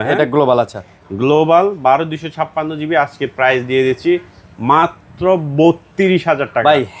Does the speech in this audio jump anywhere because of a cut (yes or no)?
no